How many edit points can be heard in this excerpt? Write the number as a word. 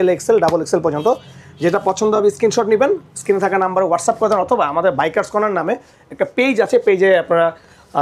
zero